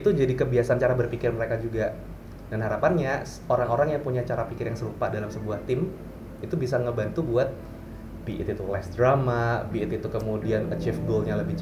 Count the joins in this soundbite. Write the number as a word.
zero